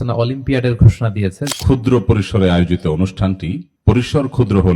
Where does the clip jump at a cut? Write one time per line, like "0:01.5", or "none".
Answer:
0:01.5